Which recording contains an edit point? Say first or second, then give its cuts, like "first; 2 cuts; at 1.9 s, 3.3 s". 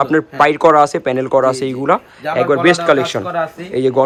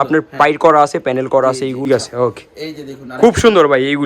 second; 1 cut; at 1.9 s